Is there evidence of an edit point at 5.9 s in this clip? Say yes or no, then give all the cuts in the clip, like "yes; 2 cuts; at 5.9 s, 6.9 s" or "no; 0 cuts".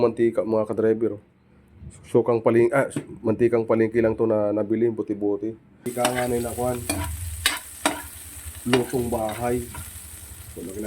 yes; 1 cut; at 5.9 s